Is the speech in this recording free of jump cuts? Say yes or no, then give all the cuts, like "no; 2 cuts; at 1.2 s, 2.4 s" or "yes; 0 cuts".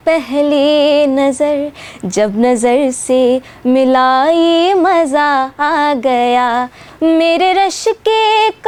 yes; 0 cuts